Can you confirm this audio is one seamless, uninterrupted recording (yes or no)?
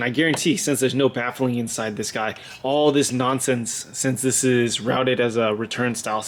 yes